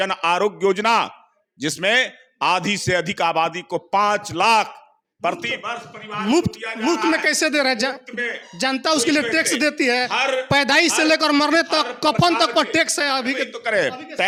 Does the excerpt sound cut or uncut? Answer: uncut